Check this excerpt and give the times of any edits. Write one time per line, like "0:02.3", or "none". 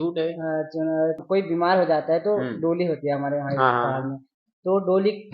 0:01.2